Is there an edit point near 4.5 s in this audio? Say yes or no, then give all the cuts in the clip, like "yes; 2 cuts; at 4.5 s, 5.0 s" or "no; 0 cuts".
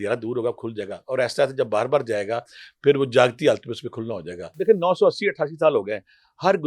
yes; 1 cut; at 4.5 s